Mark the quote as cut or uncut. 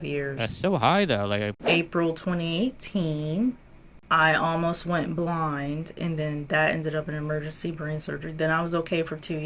cut